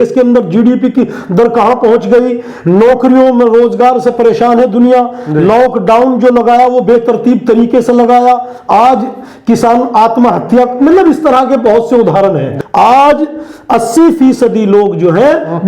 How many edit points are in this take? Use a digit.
1